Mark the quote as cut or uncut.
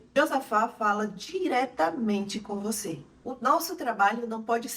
uncut